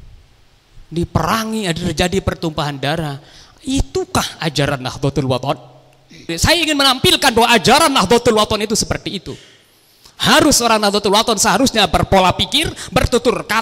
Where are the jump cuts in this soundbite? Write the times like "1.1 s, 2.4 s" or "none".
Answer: 6.3 s

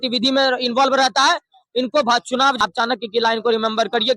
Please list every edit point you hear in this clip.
2.6 s

